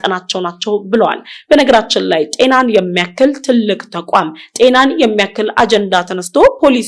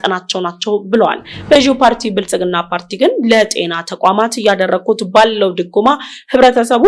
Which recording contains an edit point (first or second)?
second